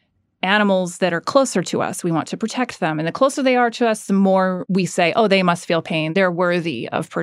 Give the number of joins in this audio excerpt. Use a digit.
2